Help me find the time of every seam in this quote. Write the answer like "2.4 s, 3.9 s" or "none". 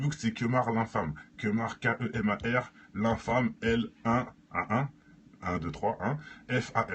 1.5 s